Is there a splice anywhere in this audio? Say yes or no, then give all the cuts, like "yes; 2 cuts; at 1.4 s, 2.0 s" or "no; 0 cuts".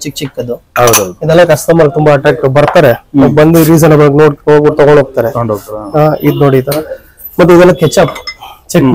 no; 0 cuts